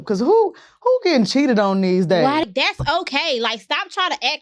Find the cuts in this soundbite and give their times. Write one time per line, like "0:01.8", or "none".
0:02.4